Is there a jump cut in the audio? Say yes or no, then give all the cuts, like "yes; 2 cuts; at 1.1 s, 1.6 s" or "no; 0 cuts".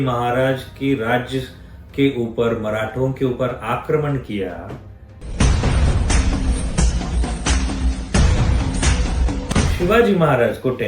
yes; 1 cut; at 9.5 s